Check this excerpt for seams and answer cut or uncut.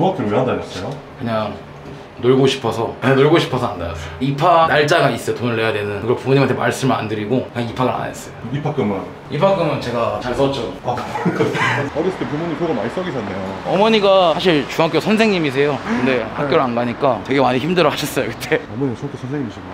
uncut